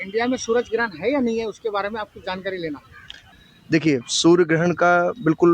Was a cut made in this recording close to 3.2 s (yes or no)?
yes